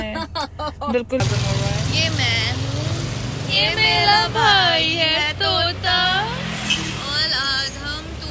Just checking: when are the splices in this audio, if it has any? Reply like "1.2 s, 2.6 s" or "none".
1.2 s